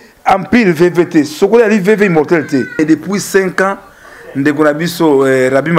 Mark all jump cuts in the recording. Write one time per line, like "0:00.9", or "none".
0:02.8